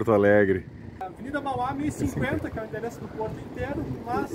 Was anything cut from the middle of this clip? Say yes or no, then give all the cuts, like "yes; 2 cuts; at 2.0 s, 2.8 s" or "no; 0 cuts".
yes; 1 cut; at 1.1 s